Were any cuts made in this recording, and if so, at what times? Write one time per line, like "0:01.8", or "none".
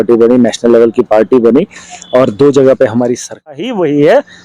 0:03.5